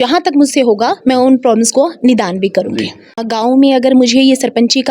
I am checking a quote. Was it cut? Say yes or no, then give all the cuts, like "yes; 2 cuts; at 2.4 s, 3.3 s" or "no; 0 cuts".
yes; 1 cut; at 3.2 s